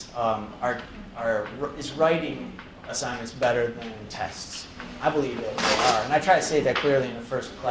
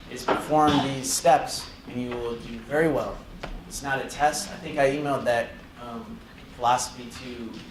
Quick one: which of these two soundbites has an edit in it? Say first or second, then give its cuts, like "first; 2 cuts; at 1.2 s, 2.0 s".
first; 1 cut; at 6.5 s